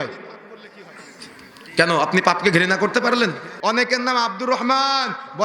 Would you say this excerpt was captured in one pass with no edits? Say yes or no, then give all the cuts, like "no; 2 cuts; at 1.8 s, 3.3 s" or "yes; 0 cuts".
no; 1 cut; at 3.5 s